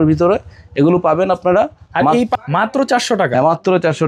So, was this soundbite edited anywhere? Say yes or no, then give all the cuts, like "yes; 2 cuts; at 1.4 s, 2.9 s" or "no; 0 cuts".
yes; 1 cut; at 2.3 s